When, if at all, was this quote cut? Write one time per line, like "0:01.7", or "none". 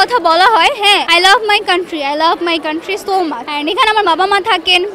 0:01.1
0:03.5